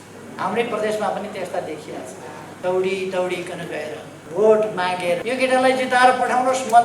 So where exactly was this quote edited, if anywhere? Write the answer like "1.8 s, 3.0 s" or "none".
2.5 s, 4.1 s, 5.2 s